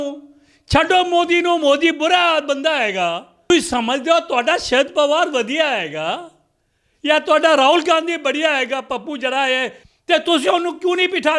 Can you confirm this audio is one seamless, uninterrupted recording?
no; 2 cuts; at 3.5 s, 9.8 s

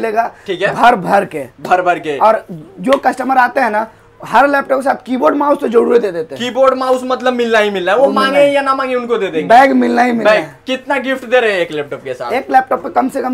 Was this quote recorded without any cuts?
yes; 0 cuts

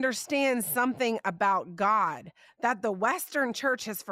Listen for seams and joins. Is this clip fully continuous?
yes; 0 cuts

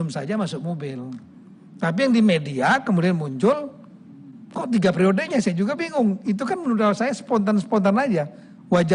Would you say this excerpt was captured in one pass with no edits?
yes; 0 cuts

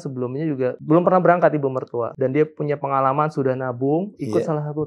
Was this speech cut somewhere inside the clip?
yes; 2 cuts; at 0.8 s, 2.1 s

